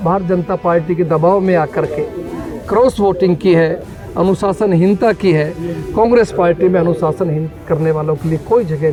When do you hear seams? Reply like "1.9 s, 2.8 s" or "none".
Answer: none